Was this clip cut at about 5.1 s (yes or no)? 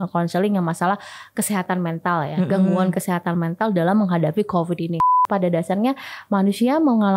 yes